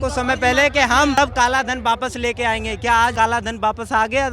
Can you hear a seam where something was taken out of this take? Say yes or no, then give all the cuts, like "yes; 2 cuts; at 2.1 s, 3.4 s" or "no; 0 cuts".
yes; 2 cuts; at 1.2 s, 3.1 s